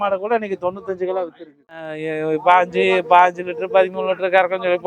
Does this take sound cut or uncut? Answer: cut